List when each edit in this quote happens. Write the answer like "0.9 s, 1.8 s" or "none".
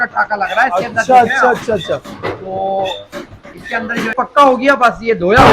4.1 s

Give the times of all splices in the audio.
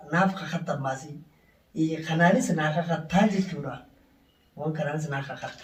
none

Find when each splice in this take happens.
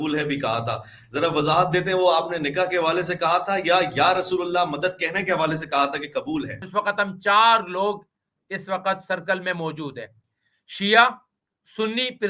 6.6 s

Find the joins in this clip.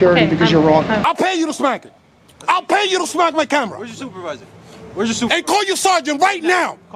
1.0 s

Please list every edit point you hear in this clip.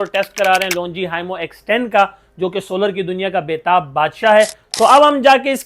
4.6 s

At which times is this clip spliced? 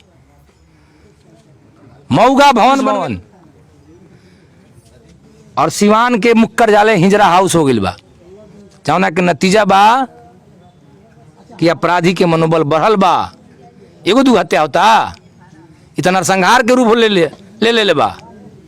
2.9 s

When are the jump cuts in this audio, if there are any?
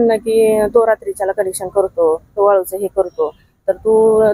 none

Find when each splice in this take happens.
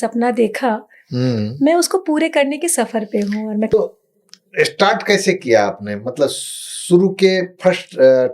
3.7 s

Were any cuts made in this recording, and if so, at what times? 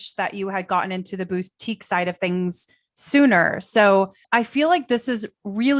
none

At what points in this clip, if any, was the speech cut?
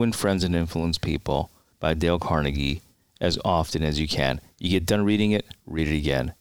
1.6 s

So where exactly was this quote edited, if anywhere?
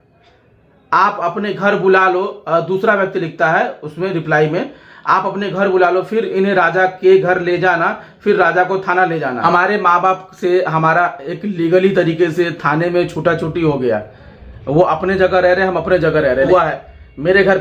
9.4 s, 16.5 s

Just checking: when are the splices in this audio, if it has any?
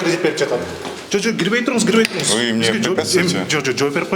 0.9 s

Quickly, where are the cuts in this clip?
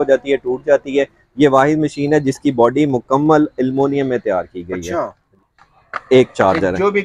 5.2 s

